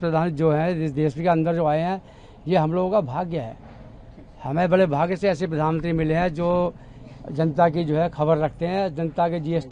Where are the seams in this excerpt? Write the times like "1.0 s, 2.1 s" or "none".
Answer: none